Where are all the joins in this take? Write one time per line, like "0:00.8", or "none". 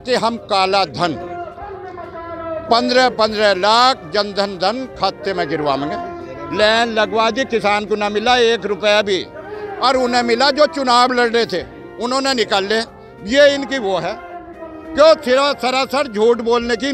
none